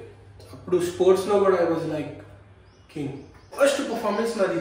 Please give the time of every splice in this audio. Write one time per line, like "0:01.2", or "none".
0:03.4